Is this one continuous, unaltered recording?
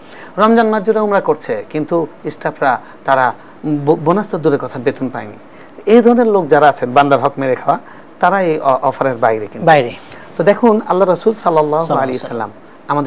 yes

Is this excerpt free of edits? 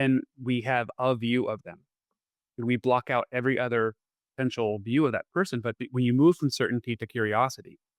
yes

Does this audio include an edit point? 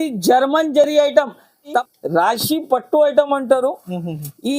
yes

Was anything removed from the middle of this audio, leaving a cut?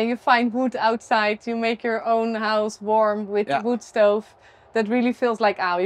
no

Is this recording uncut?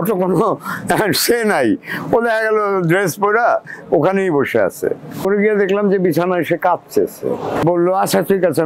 no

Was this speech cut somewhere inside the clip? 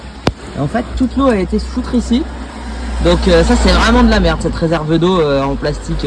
no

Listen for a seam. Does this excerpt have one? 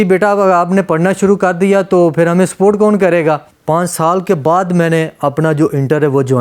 yes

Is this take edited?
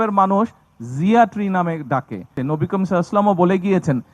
yes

